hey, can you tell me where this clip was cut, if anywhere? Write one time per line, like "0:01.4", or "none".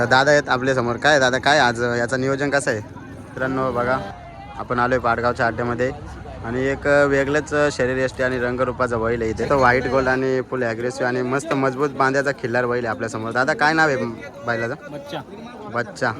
0:03.3
0:09.5